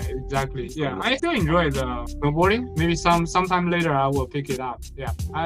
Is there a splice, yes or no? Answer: yes